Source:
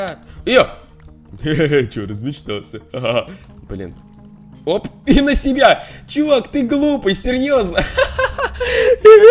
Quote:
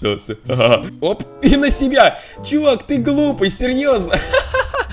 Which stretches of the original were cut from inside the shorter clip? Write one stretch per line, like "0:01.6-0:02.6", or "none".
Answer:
0:03.3-0:04.5